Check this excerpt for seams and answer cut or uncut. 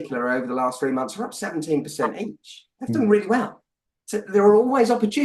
uncut